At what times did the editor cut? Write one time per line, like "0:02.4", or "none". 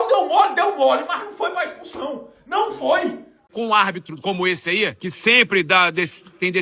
0:03.4
0:05.0